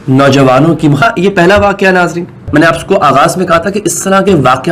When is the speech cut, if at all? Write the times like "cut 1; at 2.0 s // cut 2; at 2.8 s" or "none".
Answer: cut 1; at 1.0 s